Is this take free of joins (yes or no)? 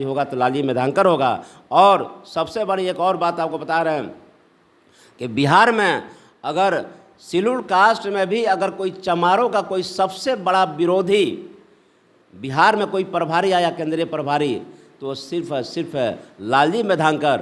yes